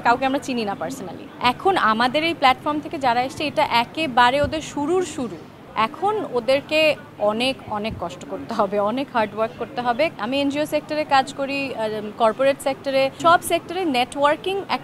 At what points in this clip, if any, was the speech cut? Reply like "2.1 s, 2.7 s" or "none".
1.1 s, 5.6 s, 10.1 s, 13.1 s

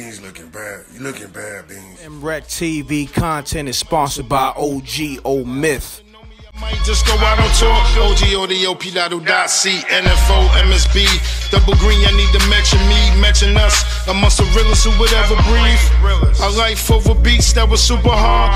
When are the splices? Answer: 2.1 s

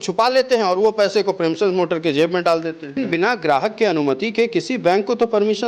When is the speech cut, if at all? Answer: 3.0 s

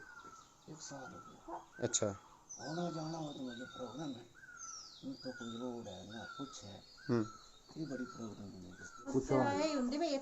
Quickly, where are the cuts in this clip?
9.1 s

